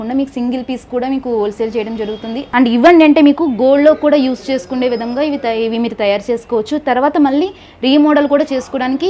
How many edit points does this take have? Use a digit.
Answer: 1